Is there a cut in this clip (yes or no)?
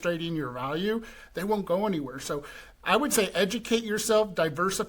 no